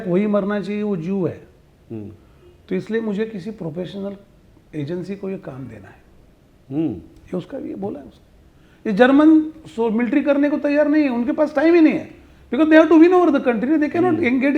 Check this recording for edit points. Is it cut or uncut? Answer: uncut